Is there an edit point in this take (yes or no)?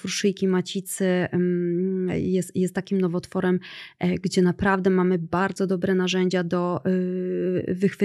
no